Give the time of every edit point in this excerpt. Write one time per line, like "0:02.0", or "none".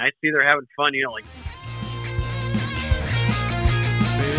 0:01.4